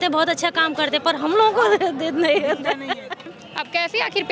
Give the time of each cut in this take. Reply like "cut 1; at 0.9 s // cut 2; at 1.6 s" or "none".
cut 1; at 3.2 s